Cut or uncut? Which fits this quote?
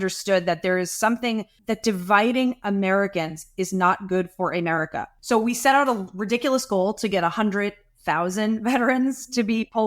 cut